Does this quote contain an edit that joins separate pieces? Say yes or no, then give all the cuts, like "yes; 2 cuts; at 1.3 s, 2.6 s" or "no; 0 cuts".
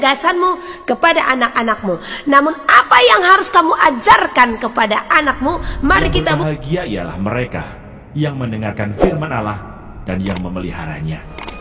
yes; 1 cut; at 6.4 s